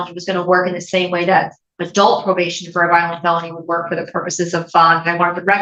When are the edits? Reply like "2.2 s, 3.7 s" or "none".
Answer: none

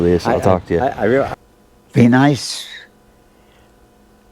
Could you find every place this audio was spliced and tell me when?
1.4 s

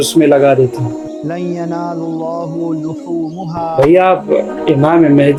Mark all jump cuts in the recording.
none

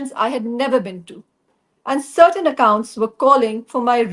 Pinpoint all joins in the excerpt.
1.6 s

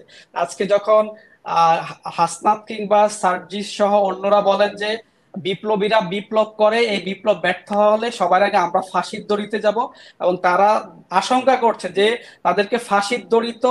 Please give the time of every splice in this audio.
none

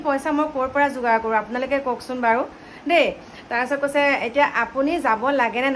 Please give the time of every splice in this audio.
none

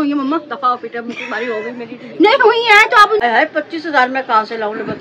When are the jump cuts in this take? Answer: 3.2 s

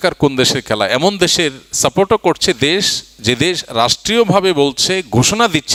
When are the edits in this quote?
none

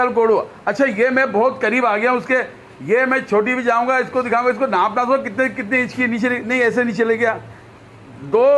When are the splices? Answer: none

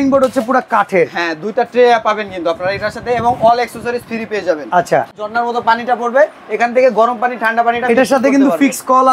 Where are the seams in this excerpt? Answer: 5.3 s

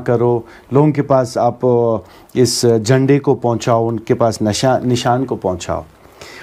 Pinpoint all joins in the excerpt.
none

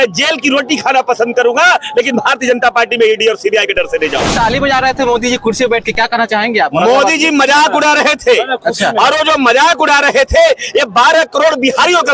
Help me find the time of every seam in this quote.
4.3 s

